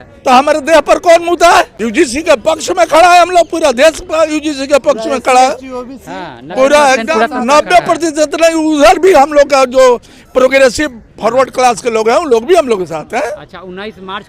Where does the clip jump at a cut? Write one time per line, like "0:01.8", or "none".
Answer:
0:01.8